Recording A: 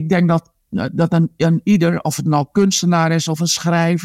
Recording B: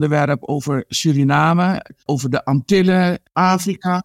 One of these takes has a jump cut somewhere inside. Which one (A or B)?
B